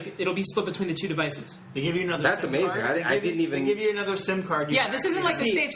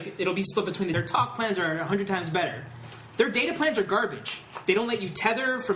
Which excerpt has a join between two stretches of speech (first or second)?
first